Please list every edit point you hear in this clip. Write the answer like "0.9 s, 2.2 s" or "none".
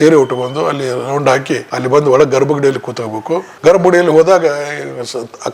1.7 s, 3.4 s